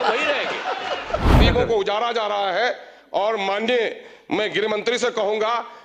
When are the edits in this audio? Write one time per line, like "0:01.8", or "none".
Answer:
0:01.4